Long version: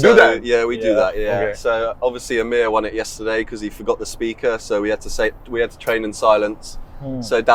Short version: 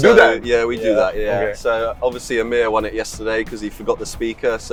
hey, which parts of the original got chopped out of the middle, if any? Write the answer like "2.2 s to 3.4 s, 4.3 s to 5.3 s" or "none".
none